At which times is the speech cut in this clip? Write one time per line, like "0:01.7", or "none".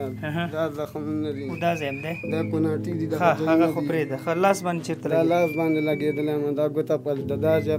none